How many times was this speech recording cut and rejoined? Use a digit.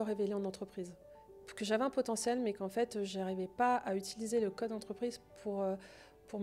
0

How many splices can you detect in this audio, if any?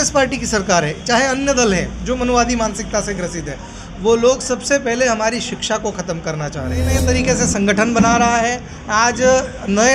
1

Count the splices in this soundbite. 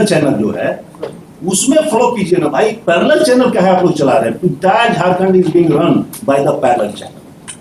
0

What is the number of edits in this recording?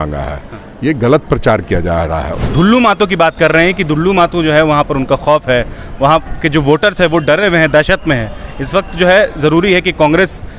1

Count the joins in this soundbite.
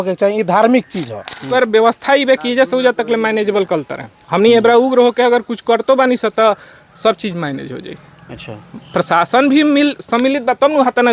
1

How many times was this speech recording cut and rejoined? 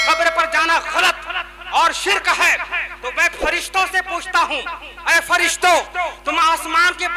0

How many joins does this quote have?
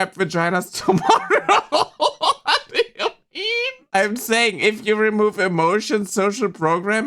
1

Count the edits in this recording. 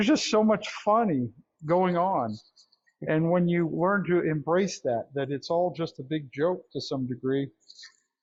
0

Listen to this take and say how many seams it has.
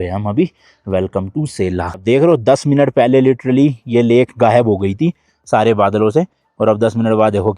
1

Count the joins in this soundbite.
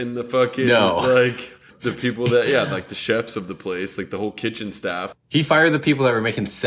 1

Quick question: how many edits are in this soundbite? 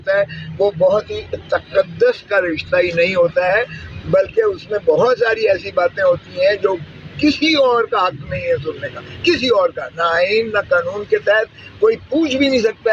0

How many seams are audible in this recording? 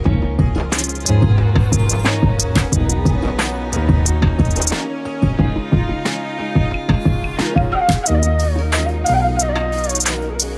0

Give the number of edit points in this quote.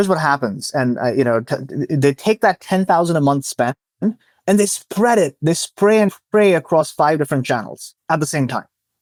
0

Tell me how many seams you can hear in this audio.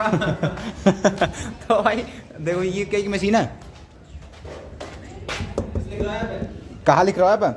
0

